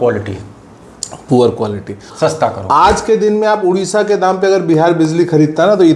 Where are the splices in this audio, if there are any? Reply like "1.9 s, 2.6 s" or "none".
2.1 s